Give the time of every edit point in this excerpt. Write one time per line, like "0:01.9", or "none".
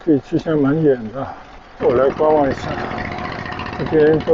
0:01.8

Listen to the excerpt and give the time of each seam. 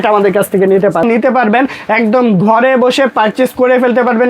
0:01.0

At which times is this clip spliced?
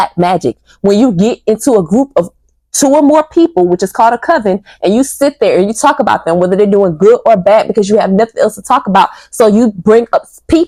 none

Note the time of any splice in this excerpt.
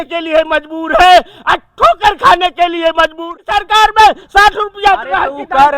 0:03.2

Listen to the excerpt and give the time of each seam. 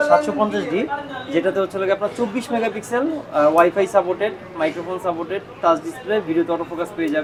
none

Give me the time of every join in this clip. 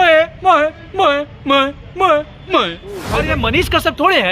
0:03.1

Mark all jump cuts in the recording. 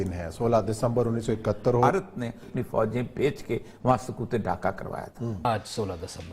0:02.5
0:05.4

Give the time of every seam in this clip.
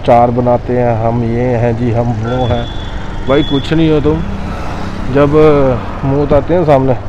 none

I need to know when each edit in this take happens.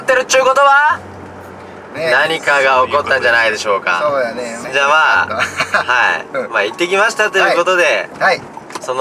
0:04.6

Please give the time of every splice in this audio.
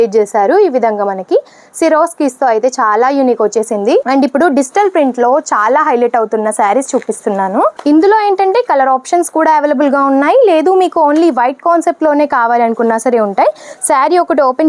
none

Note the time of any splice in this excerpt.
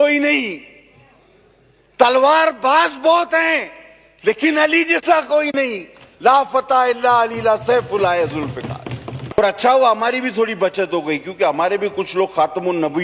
0:09.4

